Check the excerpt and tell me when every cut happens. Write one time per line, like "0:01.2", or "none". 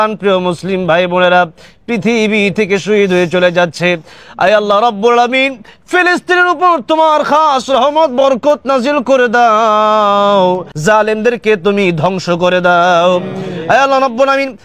0:10.7